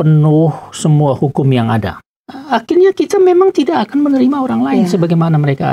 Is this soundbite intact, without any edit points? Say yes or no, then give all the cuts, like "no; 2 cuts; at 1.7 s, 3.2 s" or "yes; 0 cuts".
no; 1 cut; at 2.0 s